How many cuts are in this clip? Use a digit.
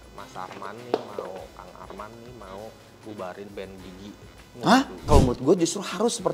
1